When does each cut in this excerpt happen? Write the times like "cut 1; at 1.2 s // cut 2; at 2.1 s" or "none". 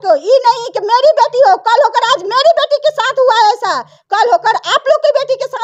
none